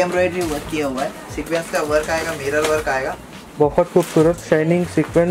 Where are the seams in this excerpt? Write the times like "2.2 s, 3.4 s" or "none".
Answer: none